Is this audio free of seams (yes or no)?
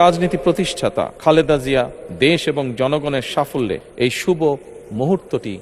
no